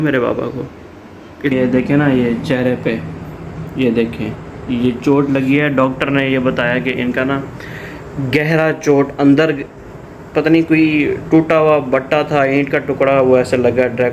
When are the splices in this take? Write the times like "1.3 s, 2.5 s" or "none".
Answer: 1.5 s